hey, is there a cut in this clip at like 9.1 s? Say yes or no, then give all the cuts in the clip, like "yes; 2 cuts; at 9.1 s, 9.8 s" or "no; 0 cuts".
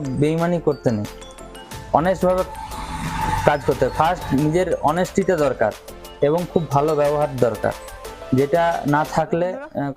no; 0 cuts